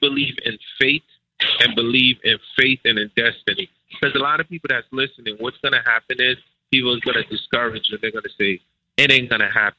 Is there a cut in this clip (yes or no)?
no